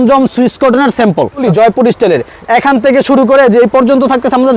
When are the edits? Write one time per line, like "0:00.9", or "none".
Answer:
0:01.4